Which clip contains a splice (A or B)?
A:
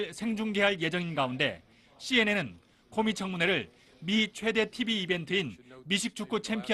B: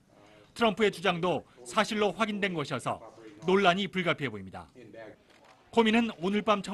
B